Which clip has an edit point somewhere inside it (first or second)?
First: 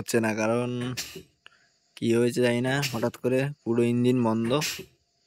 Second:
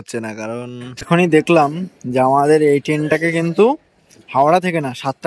second